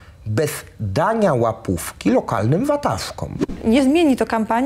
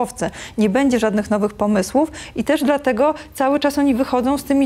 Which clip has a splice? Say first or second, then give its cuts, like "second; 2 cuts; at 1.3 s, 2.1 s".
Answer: first; 1 cut; at 3.6 s